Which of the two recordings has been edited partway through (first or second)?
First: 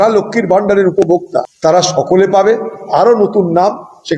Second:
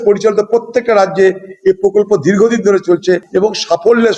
second